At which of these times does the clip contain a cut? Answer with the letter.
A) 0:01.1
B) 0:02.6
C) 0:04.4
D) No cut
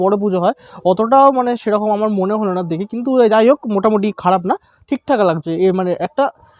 D